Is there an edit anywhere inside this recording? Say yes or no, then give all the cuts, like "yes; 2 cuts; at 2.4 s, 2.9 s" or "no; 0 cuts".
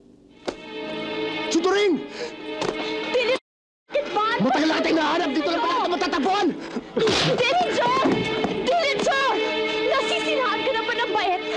no; 0 cuts